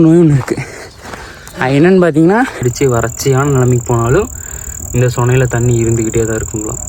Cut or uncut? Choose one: cut